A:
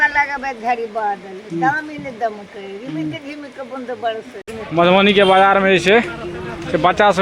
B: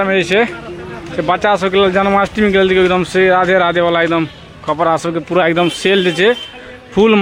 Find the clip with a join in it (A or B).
A